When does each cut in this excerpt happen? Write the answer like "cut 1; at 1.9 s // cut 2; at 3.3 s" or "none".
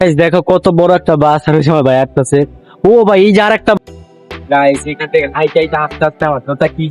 cut 1; at 3.8 s